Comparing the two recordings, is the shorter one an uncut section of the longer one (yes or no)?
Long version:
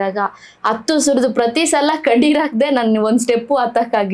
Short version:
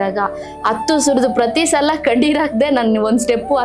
yes